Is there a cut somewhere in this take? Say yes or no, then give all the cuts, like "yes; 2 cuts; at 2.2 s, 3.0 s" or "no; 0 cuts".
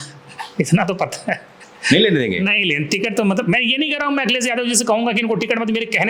no; 0 cuts